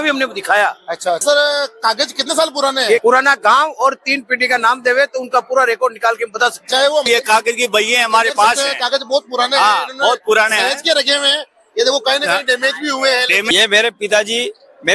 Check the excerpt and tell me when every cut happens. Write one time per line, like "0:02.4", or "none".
0:01.2
0:03.0
0:07.1
0:13.4